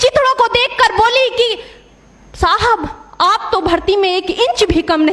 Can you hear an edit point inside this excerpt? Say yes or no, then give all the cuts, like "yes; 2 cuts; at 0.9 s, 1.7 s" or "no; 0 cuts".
no; 0 cuts